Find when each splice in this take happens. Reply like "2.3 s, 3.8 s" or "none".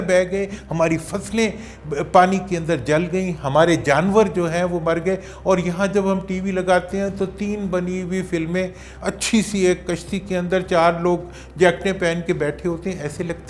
none